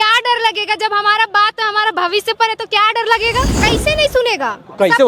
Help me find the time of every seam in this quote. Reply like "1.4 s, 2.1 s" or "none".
3.6 s